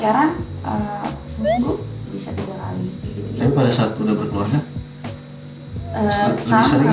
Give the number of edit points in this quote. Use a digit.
0